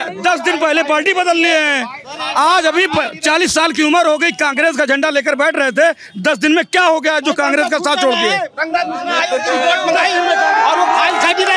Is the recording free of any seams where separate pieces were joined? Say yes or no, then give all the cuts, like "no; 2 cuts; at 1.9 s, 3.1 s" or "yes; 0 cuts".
yes; 0 cuts